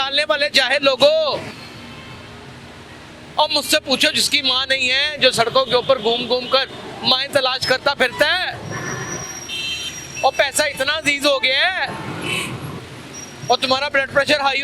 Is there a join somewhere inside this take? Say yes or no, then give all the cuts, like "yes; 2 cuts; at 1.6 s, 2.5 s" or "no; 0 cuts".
no; 0 cuts